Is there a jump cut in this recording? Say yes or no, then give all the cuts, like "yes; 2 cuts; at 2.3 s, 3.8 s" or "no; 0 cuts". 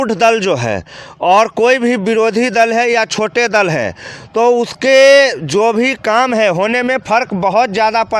no; 0 cuts